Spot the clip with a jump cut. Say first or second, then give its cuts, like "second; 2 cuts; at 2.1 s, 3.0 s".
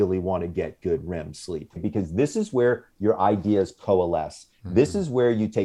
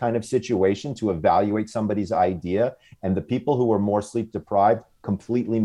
first; 1 cut; at 1.8 s